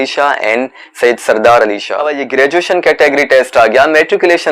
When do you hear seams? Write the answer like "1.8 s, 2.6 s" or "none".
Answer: 2.1 s